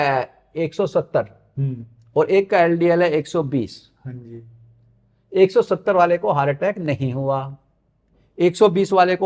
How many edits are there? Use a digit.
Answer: 0